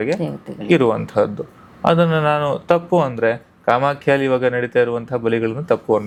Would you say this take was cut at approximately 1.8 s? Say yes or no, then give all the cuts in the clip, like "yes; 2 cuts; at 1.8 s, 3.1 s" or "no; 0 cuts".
no; 0 cuts